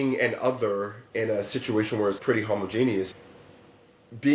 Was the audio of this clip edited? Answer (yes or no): no